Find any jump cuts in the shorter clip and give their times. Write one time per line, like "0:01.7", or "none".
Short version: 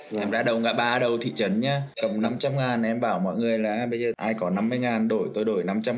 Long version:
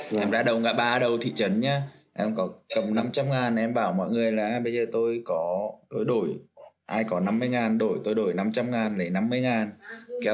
0:01.9
0:04.2